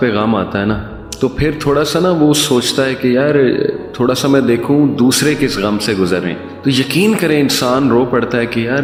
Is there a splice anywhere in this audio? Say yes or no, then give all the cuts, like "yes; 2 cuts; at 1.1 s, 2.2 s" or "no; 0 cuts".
no; 0 cuts